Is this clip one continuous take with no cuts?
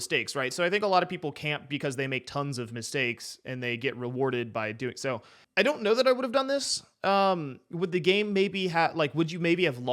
no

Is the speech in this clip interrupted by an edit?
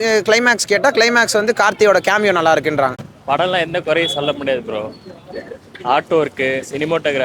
yes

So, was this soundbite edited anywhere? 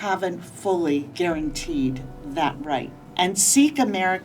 yes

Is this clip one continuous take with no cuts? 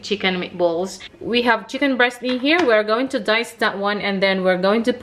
no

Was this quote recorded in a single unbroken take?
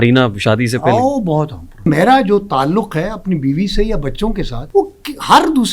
no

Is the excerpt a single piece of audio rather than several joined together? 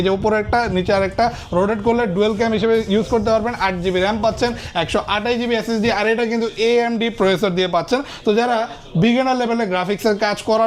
yes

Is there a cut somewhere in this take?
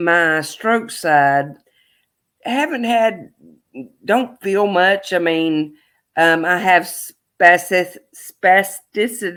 no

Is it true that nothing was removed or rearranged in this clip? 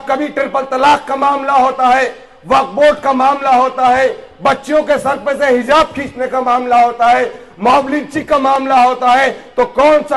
yes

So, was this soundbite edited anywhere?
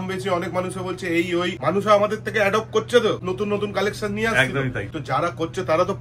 yes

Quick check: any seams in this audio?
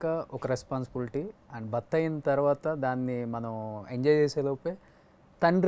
no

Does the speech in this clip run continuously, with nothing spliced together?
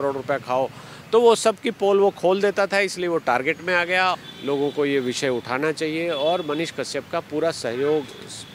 no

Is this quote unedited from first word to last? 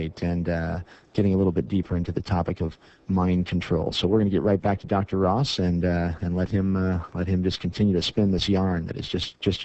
no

